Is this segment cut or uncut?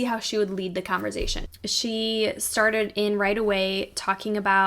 cut